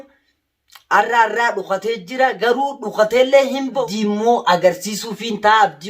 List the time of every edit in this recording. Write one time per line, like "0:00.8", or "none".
0:03.8

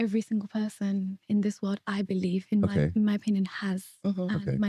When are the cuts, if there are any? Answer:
none

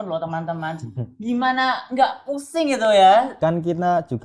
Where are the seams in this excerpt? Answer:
0:03.3

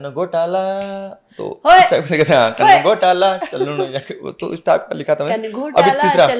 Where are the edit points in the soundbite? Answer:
none

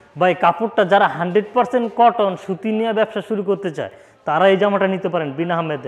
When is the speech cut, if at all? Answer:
none

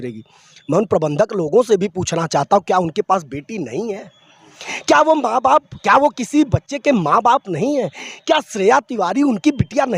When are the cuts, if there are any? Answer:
none

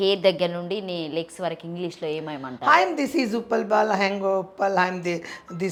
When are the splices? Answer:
none

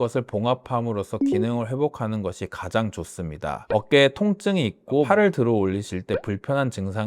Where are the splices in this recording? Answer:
0:03.6

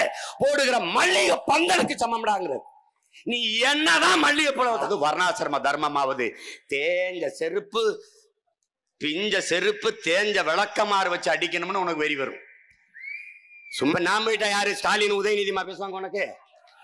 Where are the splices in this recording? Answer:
0:04.8
0:13.9

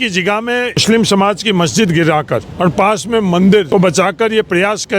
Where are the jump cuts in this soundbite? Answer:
0:00.8
0:02.5
0:03.7

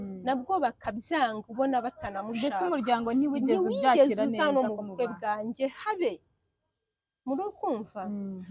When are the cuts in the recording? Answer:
none

